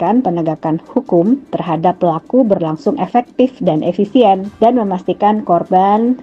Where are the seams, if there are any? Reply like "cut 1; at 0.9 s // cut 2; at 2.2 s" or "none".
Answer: cut 1; at 4.5 s